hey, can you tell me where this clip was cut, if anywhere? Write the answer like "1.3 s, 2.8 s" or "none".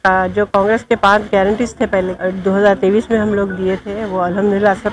2.1 s